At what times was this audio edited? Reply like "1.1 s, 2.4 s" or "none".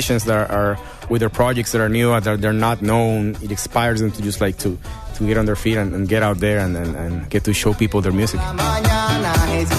1.0 s